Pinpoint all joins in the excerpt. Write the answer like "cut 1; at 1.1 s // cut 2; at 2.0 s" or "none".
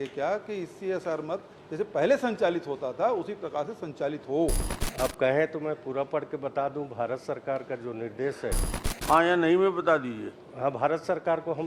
cut 1; at 4.7 s // cut 2; at 8.7 s